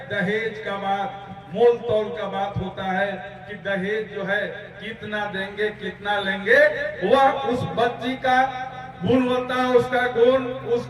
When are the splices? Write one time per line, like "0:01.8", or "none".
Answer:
none